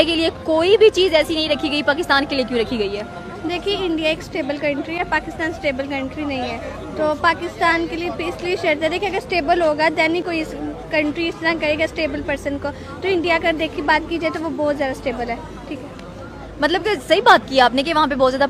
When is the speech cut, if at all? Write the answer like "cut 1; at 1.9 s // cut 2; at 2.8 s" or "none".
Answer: none